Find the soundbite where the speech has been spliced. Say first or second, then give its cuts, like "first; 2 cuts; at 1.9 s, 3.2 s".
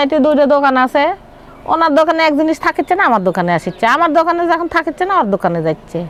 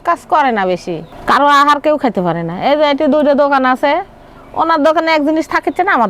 second; 1 cut; at 1.0 s